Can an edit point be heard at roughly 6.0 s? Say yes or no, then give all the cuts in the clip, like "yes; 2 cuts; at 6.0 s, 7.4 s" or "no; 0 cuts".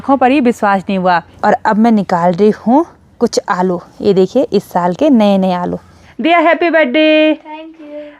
yes; 2 cuts; at 1.3 s, 6.0 s